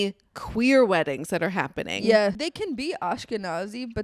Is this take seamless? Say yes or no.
no